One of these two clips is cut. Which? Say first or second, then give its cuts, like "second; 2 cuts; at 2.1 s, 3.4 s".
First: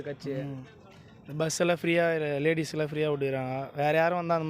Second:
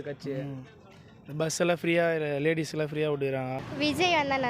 second; 1 cut; at 3.6 s